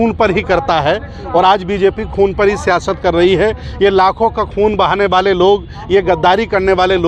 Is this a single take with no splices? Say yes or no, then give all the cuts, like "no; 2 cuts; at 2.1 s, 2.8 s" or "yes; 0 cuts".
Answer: yes; 0 cuts